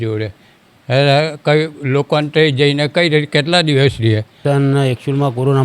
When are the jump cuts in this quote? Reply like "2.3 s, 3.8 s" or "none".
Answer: 4.4 s